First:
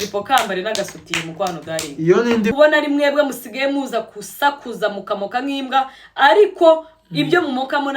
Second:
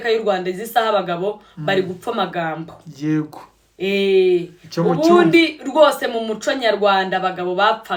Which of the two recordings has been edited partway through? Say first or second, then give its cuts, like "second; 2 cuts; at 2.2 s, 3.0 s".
first; 1 cut; at 2.5 s